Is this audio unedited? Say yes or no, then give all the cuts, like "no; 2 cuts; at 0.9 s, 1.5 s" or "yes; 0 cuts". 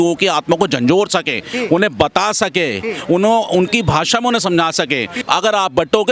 no; 1 cut; at 5.1 s